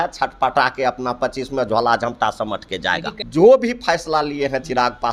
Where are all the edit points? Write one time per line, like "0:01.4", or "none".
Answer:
0:03.1